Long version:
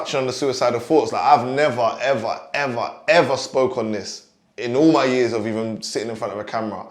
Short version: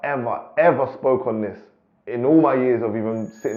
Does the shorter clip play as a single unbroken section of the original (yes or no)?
yes